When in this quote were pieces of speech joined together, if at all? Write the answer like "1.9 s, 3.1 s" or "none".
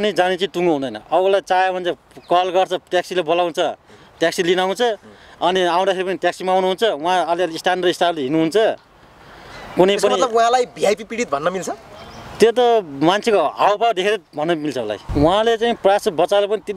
15.0 s